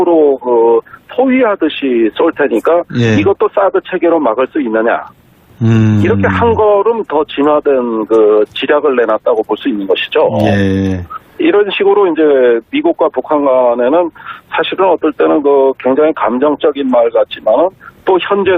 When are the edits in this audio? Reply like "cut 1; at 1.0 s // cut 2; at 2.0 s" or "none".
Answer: cut 1; at 8.6 s